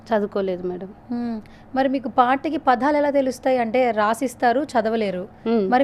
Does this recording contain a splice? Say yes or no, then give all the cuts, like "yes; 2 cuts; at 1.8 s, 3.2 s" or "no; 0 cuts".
no; 0 cuts